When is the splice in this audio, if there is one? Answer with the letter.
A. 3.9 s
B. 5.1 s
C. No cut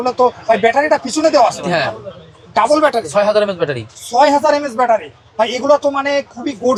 C